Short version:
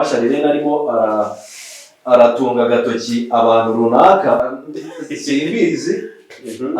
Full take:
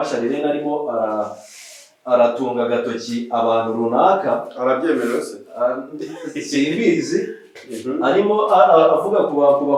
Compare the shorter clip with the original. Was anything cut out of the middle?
yes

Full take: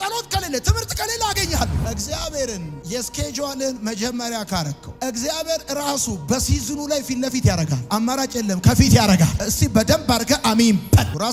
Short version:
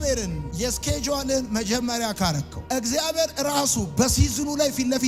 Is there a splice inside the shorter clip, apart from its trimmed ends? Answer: no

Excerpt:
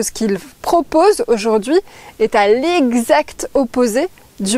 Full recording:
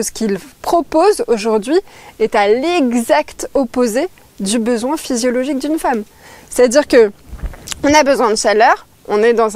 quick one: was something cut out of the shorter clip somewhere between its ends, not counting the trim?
no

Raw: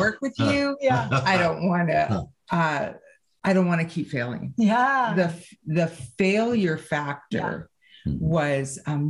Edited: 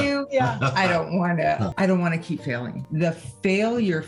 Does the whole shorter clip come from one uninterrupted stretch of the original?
no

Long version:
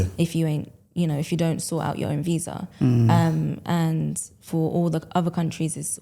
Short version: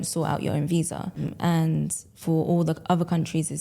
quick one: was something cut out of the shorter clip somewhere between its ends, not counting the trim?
yes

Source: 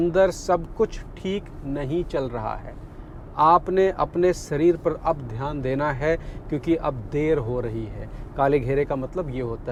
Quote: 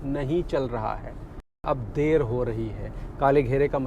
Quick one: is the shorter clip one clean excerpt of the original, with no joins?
no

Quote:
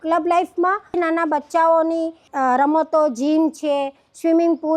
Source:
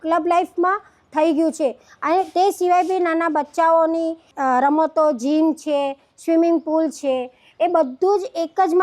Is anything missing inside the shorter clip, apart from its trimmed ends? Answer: yes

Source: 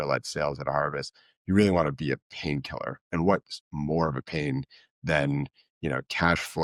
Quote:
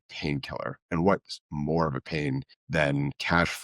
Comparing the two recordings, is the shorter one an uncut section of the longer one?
no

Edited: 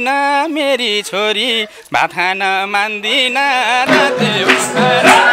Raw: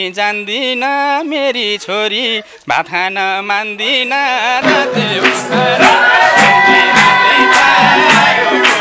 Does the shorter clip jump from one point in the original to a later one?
no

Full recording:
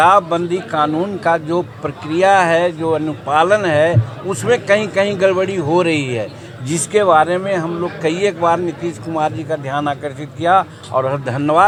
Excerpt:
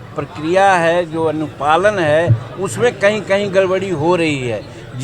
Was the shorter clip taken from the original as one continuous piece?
yes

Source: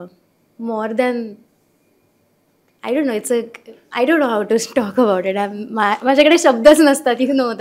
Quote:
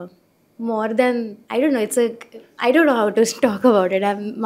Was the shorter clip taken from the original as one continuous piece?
no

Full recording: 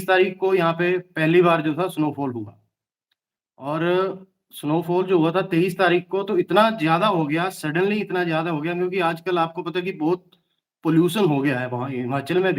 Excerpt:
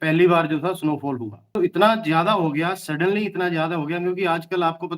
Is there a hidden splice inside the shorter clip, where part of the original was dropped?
yes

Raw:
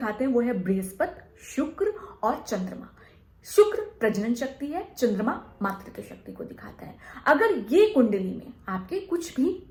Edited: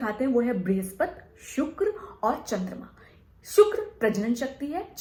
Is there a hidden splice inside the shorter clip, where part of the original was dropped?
no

